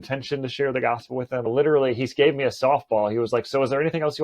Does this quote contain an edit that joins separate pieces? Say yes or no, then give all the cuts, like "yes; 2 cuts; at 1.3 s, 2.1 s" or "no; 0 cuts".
yes; 1 cut; at 1.5 s